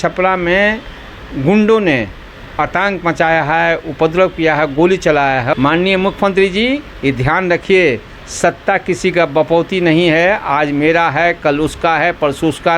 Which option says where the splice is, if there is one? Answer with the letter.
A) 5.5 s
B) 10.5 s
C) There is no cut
A